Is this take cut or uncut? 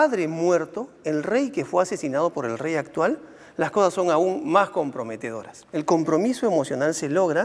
cut